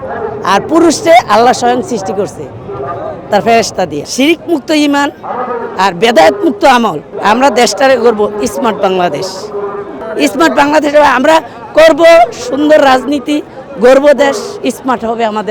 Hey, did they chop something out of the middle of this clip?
yes; 3 cuts; at 4.0 s, 7.1 s, 10.0 s

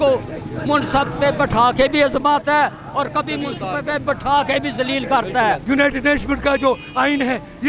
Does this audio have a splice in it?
yes; 1 cut; at 5.6 s

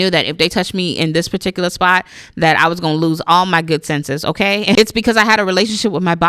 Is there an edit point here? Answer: yes; 1 cut; at 4.8 s

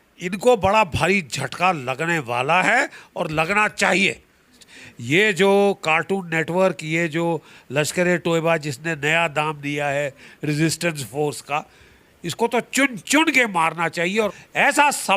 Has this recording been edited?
yes; 2 cuts; at 4.7 s, 14.4 s

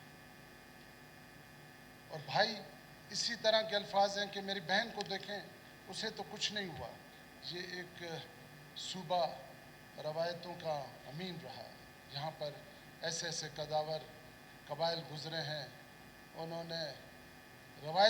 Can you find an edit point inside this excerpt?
yes; 1 cut; at 7.1 s

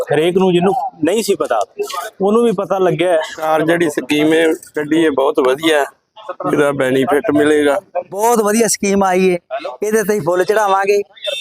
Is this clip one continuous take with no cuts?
no; 2 cuts; at 3.4 s, 8.1 s

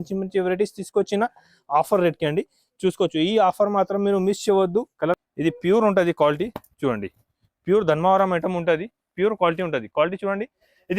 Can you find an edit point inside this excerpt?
yes; 1 cut; at 5.2 s

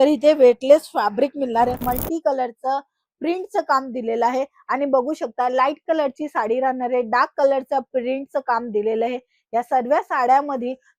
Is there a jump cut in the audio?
yes; 1 cut; at 1.8 s

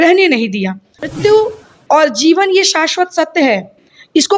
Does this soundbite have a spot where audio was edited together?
yes; 1 cut; at 1.1 s

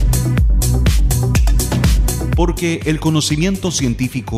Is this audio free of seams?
no; 1 cut; at 2.3 s

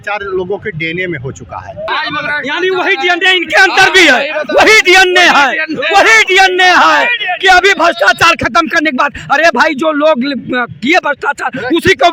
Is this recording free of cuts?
yes; 0 cuts

